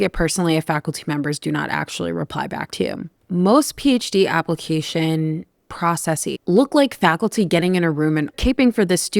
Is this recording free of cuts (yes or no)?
no